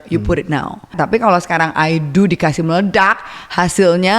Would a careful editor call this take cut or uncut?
cut